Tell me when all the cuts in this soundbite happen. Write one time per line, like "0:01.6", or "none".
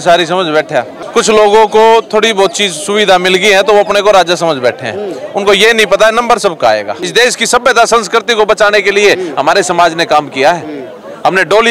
0:01.0
0:07.0